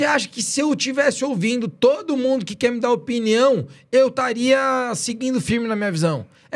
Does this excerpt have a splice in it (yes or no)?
no